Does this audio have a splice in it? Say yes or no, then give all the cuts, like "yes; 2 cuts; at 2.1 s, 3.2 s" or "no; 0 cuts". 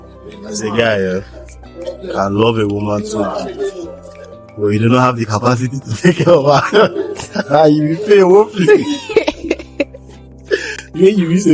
no; 0 cuts